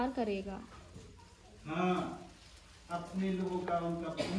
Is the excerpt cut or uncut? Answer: uncut